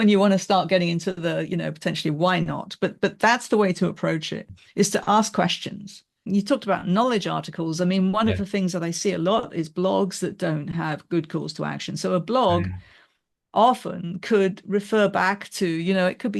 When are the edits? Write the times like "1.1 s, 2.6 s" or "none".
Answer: 6.3 s